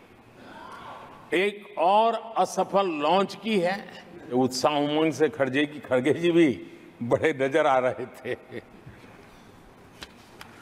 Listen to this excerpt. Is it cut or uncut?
cut